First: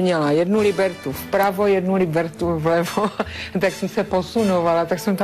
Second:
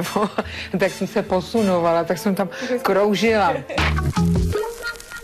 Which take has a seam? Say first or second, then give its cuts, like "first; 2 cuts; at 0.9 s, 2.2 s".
second; 1 cut; at 3.7 s